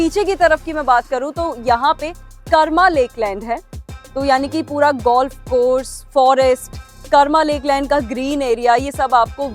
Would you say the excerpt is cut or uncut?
uncut